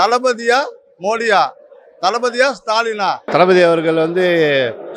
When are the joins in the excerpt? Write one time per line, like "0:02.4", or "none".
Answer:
0:03.2